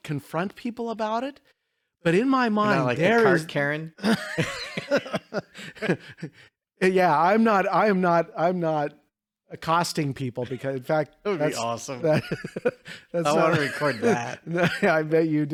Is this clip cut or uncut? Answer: uncut